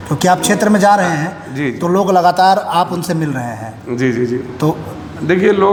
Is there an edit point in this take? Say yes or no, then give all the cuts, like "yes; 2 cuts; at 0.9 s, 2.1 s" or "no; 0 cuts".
no; 0 cuts